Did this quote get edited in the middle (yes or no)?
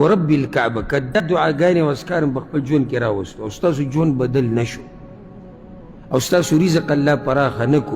yes